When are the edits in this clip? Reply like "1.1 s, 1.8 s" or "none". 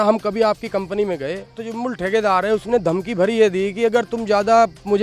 1.7 s